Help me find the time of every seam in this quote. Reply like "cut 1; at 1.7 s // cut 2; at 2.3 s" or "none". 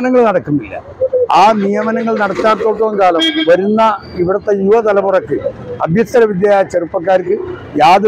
none